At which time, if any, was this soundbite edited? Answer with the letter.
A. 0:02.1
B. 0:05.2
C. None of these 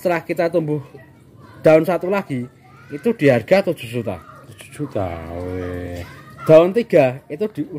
C